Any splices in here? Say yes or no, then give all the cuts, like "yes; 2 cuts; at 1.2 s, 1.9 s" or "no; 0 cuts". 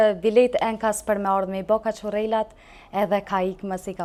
no; 0 cuts